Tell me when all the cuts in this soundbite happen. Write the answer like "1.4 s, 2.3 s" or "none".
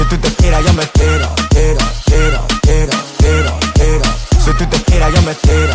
none